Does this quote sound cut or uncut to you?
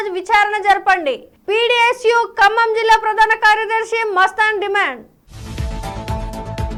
uncut